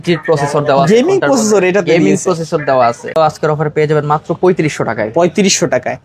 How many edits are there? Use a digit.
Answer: 1